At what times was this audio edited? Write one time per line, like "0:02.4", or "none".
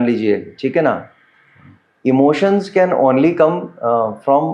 none